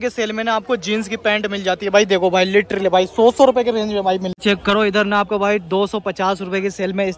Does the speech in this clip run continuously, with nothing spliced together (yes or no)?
no